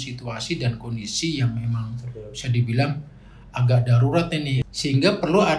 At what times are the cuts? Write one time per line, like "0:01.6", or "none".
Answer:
0:04.6